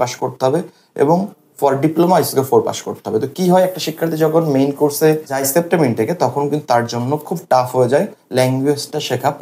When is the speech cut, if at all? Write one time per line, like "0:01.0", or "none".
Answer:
none